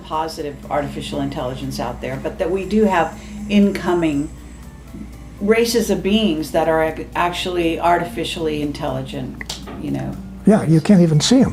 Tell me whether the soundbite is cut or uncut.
uncut